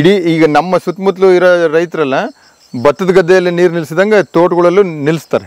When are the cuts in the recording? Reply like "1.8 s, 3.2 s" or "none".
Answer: none